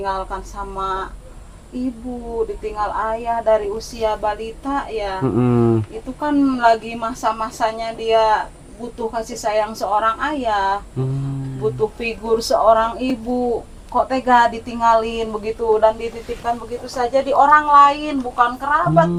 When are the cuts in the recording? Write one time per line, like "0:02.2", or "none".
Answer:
none